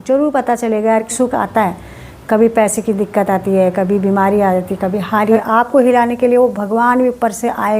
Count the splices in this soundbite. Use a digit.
2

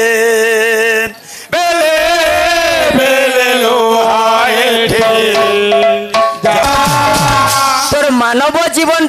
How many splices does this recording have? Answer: 1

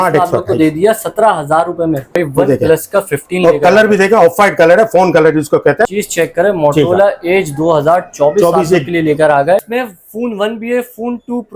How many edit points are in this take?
3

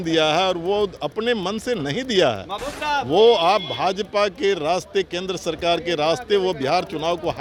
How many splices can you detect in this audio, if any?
0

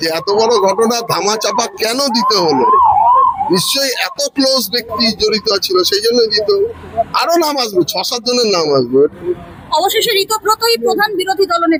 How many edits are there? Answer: 0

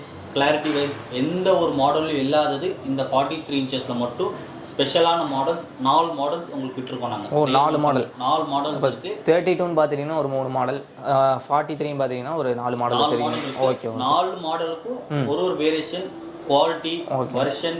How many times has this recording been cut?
0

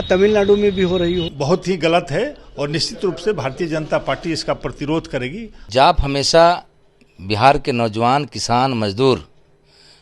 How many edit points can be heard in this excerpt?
2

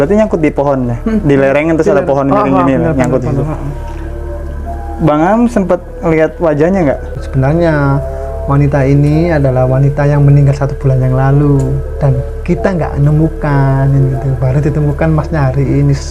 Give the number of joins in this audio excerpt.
1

